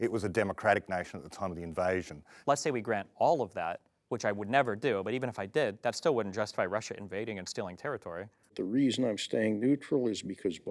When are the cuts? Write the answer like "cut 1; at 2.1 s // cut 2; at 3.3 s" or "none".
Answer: cut 1; at 2.3 s // cut 2; at 8.6 s